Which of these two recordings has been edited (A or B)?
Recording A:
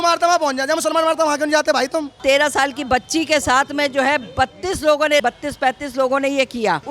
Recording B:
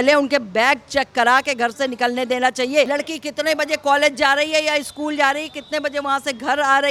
A